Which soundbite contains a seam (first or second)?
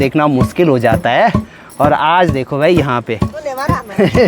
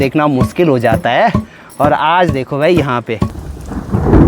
second